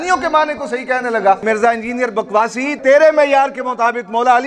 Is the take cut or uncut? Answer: cut